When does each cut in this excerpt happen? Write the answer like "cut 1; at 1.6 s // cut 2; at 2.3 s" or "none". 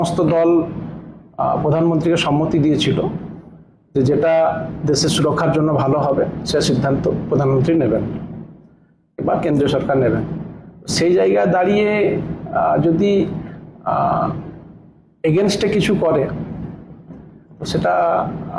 none